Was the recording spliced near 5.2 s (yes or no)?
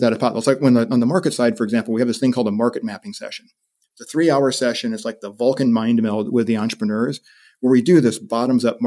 no